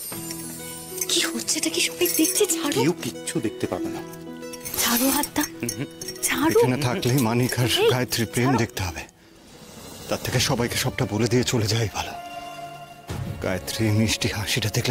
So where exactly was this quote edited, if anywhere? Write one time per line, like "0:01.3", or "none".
none